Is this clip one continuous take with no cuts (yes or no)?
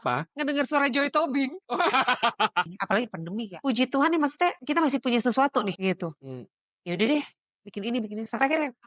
no